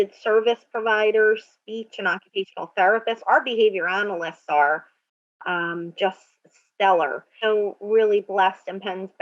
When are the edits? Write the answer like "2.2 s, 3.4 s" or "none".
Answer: 7.2 s